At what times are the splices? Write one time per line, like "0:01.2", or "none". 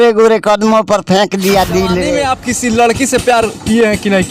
0:02.2